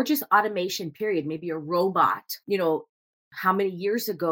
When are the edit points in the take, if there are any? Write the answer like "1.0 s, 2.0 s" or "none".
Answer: 2.4 s